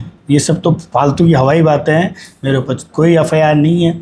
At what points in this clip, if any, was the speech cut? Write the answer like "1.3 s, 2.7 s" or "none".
none